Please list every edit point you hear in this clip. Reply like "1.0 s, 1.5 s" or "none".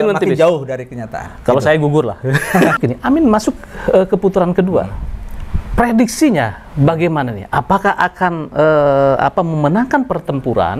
2.7 s